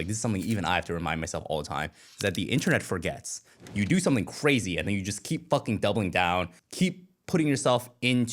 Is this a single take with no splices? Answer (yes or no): no